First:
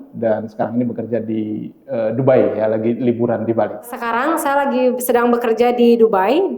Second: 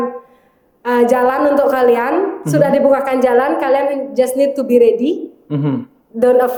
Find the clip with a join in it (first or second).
first